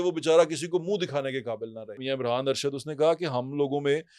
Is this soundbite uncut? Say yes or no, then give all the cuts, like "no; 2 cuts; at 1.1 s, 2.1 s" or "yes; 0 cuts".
no; 1 cut; at 2.0 s